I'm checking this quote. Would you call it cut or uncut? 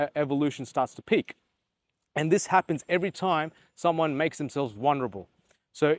uncut